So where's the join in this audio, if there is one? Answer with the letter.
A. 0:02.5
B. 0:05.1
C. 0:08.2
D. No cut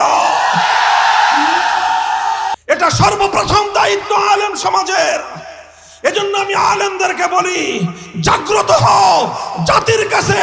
A